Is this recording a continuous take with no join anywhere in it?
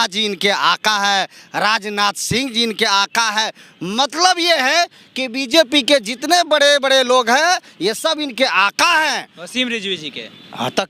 yes; 0 cuts

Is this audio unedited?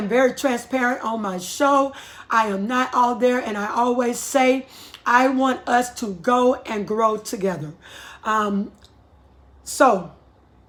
yes; 0 cuts

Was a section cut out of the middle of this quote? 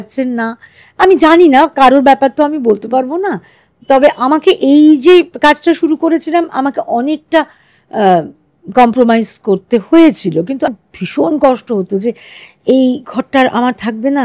yes; 1 cut; at 10.7 s

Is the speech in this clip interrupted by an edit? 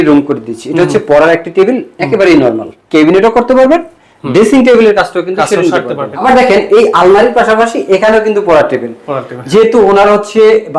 yes; 2 cuts; at 2.7 s, 6.2 s

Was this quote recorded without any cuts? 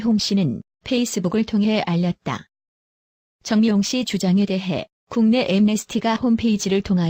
yes; 0 cuts

